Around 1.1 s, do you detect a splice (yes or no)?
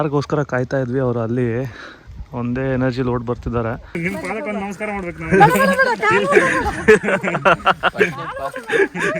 no